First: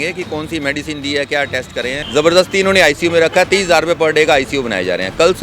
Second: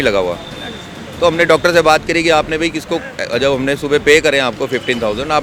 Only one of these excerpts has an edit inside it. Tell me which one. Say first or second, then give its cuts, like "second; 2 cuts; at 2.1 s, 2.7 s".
first; 1 cut; at 2.0 s